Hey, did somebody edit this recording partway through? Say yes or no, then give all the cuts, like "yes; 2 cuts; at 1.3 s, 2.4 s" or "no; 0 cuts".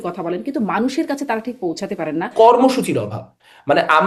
yes; 1 cut; at 2.3 s